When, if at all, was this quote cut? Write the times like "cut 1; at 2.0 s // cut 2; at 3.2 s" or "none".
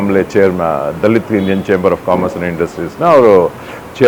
none

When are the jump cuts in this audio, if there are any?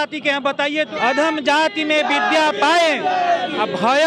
cut 1; at 0.9 s

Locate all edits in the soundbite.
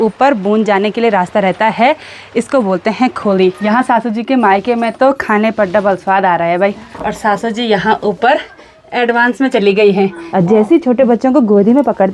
cut 1; at 3.6 s // cut 2; at 6.8 s // cut 3; at 10.2 s

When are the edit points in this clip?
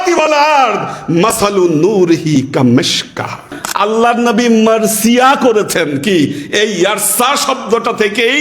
cut 1; at 3.6 s

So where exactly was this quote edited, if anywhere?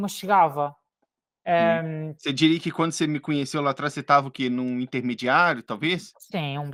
none

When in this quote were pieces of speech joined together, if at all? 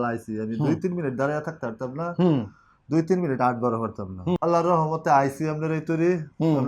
cut 1; at 4.4 s

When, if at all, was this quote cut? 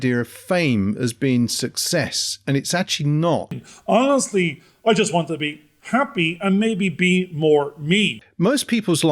cut 1; at 3.6 s // cut 2; at 8.2 s

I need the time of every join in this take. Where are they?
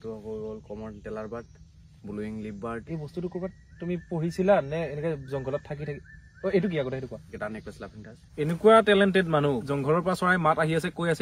cut 1; at 2.8 s // cut 2; at 7.8 s // cut 3; at 9.7 s

